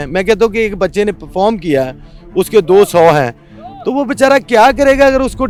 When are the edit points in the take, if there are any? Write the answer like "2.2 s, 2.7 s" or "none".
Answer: none

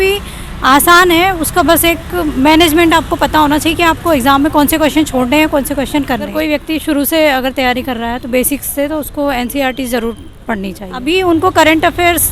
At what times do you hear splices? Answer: 6.3 s, 10.9 s

